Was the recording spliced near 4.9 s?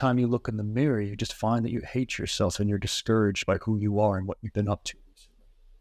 no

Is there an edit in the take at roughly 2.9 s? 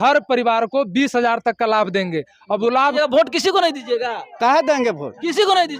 yes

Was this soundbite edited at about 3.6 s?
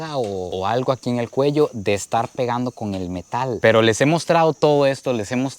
yes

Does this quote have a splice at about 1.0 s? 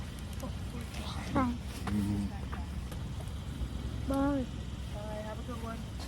no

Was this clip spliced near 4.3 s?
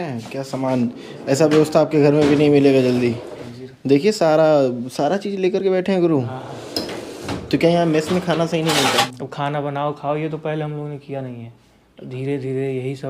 no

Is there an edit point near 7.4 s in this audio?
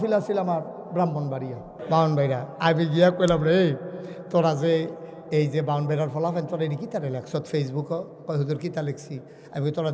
no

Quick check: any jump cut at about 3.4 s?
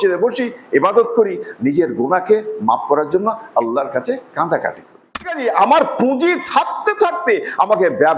no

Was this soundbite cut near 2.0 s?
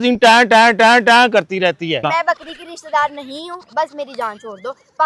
yes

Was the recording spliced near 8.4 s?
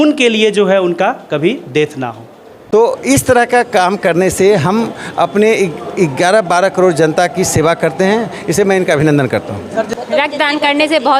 no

